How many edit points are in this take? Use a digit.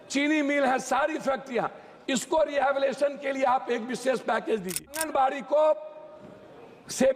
1